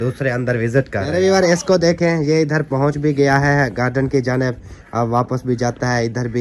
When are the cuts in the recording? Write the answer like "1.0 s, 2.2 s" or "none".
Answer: 1.0 s